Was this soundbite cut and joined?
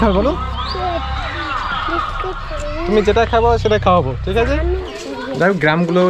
yes; 1 cut; at 4.9 s

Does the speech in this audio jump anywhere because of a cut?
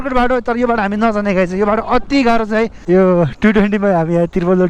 yes; 1 cut; at 2.8 s

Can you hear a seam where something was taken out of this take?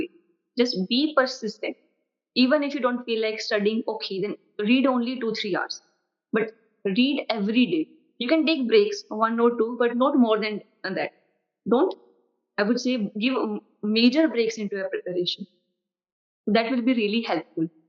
no; 0 cuts

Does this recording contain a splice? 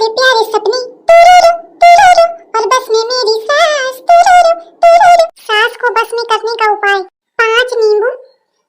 yes; 1 cut; at 5.4 s

